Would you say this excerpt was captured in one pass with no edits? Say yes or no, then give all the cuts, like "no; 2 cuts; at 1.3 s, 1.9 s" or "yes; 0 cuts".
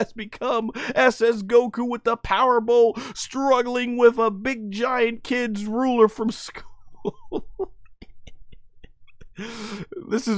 yes; 0 cuts